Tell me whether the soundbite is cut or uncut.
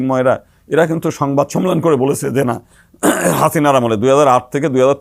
uncut